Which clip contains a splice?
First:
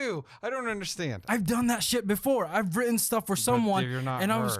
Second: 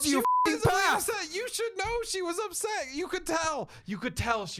first; 1 cut; at 1.2 s

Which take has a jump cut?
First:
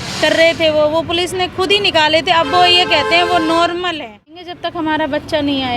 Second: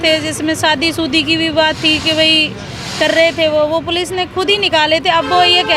first; 1 cut; at 4.6 s

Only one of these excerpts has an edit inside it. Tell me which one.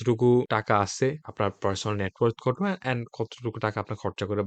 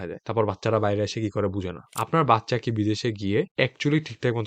second; 1 cut; at 1.9 s

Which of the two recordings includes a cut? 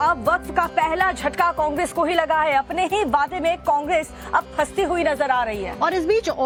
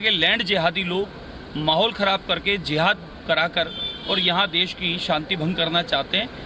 second; 1 cut; at 3.9 s

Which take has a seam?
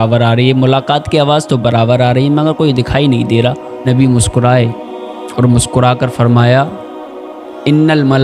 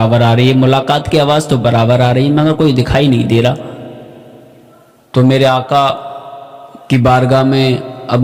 first; 1 cut; at 3.9 s

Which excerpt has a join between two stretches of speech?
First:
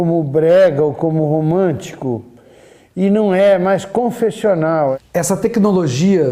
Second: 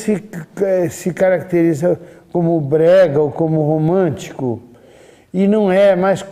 first; 1 cut; at 4.9 s

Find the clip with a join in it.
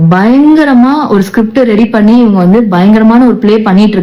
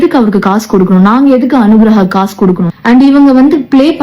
second; 1 cut; at 2.6 s

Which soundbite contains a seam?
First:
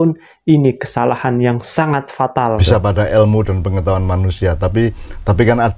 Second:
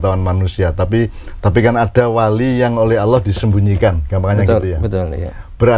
first; 1 cut; at 2.6 s

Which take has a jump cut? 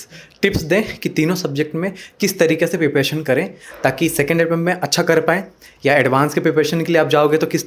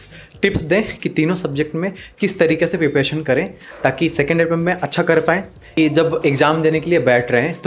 second; 1 cut; at 5.8 s

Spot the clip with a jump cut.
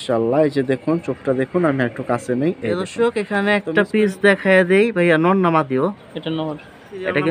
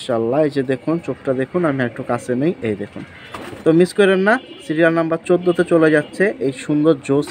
first; 1 cut; at 2.9 s

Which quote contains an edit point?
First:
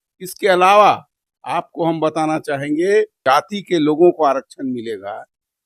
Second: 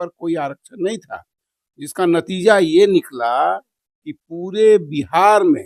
first; 1 cut; at 3.2 s

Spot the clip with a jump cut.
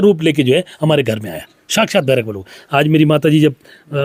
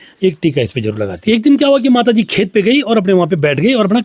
second; 1 cut; at 1.1 s

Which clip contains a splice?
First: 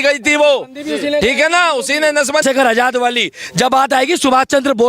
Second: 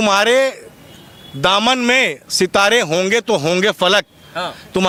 first; 1 cut; at 2.4 s

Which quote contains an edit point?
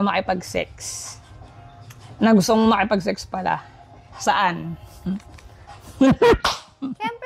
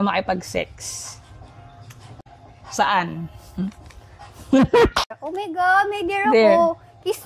second; 2 cuts; at 2.1 s, 5.2 s

